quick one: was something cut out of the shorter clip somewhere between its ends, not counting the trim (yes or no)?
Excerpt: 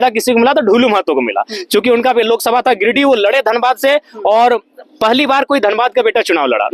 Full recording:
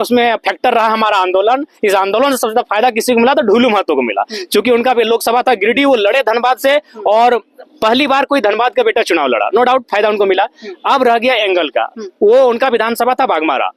no